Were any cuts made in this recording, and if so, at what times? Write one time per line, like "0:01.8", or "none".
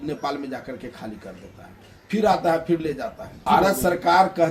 0:03.5